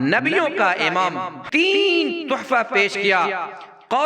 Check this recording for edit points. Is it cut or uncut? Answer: cut